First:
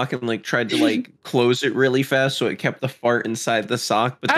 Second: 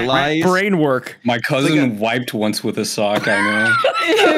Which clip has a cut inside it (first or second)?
second